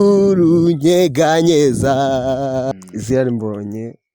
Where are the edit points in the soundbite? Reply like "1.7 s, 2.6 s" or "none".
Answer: 2.7 s